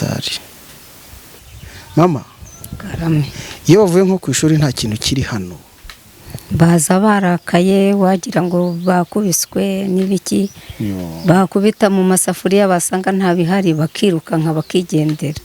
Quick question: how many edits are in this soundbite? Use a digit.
1